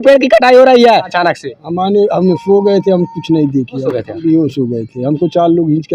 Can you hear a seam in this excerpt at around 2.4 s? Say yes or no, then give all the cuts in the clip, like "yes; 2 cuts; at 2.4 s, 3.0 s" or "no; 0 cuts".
no; 2 cuts; at 1.1 s, 3.8 s